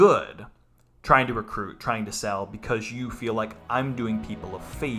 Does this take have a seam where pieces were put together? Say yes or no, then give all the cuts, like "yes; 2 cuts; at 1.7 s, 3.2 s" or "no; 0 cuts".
no; 0 cuts